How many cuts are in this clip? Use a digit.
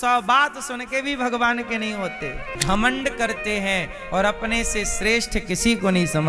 1